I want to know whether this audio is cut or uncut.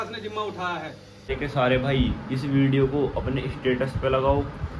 cut